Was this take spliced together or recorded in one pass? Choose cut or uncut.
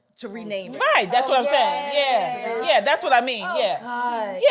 uncut